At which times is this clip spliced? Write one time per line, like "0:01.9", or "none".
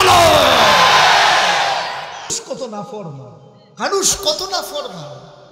0:02.4